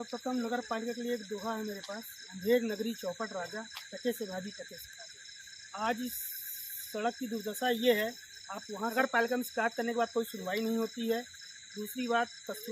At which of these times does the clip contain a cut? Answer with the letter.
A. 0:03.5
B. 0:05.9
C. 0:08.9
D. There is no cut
C